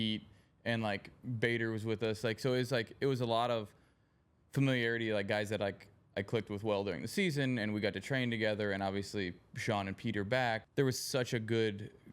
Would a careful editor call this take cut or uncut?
cut